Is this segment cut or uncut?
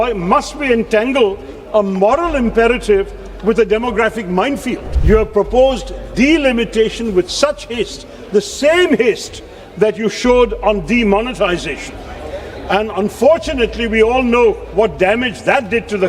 cut